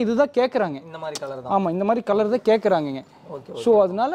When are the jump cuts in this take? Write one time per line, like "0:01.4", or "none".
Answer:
none